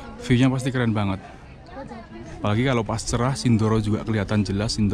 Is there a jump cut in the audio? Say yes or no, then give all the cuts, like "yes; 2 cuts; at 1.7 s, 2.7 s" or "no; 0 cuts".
no; 0 cuts